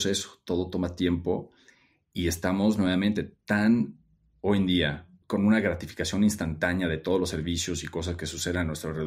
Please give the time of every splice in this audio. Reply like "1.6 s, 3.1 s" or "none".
5.1 s